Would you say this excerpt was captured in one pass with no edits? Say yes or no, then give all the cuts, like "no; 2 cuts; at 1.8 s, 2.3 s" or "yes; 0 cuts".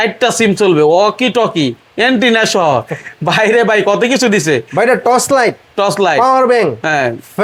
yes; 0 cuts